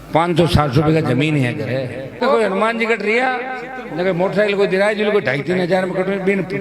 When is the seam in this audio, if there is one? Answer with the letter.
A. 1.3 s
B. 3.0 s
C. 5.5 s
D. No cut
D